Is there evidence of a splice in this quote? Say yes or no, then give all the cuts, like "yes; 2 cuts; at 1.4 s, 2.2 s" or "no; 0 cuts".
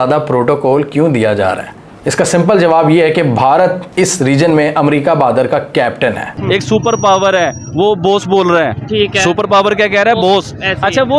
yes; 1 cut; at 6.3 s